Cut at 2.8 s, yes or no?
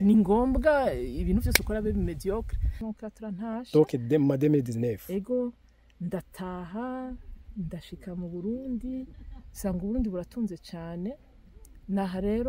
yes